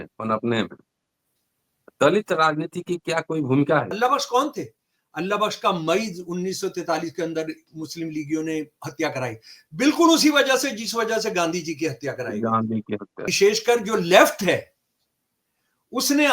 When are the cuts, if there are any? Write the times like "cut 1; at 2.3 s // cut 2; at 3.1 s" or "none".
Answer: cut 1; at 3.9 s // cut 2; at 13.3 s